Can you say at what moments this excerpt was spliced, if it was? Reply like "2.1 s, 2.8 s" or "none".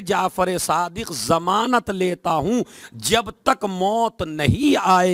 none